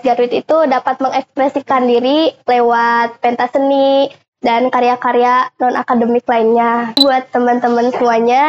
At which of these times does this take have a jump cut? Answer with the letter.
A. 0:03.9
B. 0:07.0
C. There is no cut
B